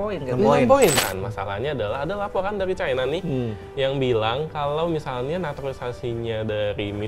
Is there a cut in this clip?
yes; 1 cut; at 1.0 s

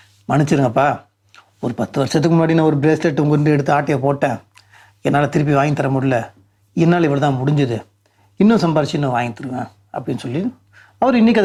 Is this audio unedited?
yes; 0 cuts

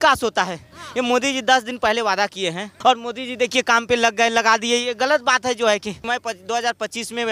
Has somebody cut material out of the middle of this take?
yes; 2 cuts; at 2.7 s, 6.0 s

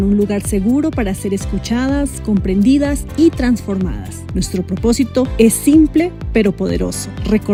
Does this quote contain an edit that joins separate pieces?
no; 0 cuts

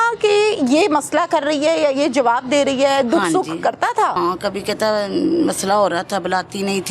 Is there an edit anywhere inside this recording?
yes; 1 cut; at 4.2 s

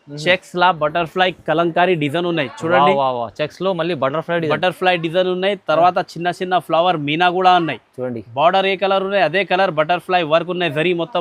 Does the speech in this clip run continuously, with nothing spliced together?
yes; 0 cuts

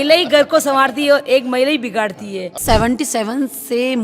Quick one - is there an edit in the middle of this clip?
yes; 1 cut; at 2.6 s

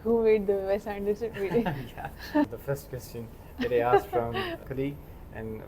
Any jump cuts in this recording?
yes; 2 cuts; at 2.5 s, 4.6 s

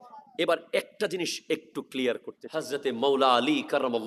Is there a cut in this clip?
yes; 1 cut; at 2.7 s

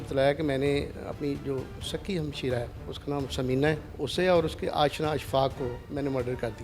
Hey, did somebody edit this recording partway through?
yes; 3 cuts; at 2.8 s, 3.9 s, 5.8 s

